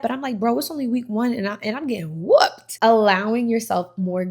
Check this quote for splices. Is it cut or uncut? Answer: cut